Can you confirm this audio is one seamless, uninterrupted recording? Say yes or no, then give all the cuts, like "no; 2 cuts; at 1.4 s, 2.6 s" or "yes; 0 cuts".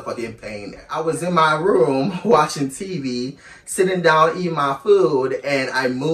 no; 1 cut; at 0.9 s